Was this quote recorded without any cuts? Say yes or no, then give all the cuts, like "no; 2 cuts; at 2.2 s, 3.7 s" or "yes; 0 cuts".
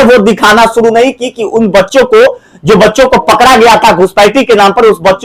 yes; 0 cuts